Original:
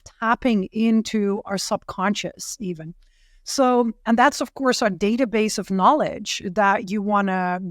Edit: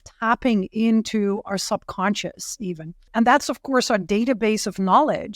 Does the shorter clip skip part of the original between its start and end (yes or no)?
yes